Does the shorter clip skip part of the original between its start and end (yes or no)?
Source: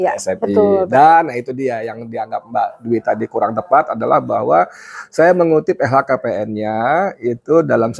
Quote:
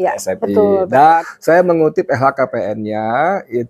yes